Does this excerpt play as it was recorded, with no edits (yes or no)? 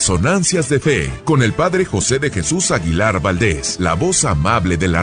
no